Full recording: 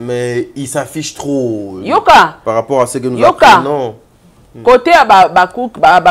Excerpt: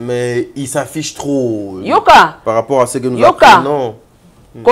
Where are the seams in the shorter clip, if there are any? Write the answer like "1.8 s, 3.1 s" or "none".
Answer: none